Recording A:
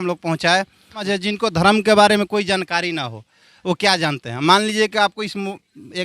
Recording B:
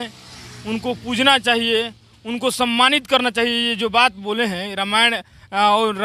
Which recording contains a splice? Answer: A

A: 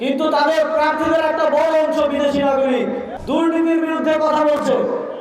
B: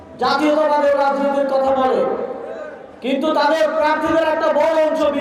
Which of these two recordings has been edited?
A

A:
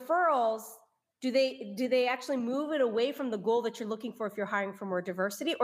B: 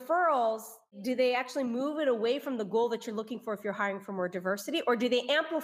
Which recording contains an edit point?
B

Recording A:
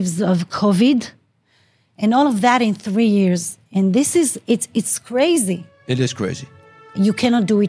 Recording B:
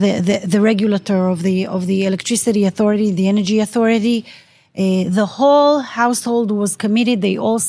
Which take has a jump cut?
A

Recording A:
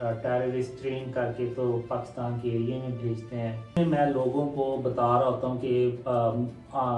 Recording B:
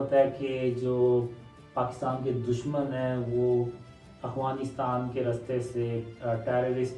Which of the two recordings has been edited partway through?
A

